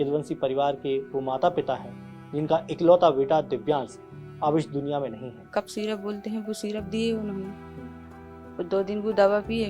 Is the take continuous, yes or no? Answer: no